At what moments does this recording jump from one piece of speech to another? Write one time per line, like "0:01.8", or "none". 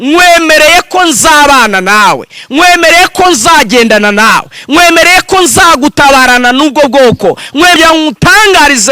0:07.8